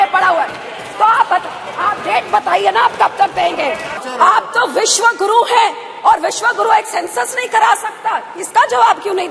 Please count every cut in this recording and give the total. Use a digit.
1